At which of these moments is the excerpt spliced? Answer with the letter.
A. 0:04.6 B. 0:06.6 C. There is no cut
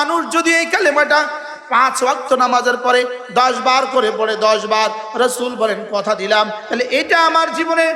B